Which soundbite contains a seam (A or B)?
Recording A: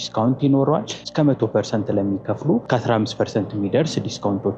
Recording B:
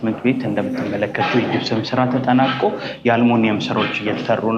A